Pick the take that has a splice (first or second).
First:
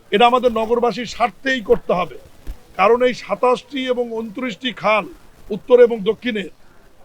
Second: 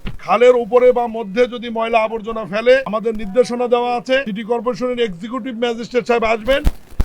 second